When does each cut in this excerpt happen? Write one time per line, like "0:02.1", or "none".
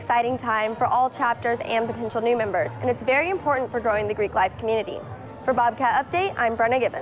none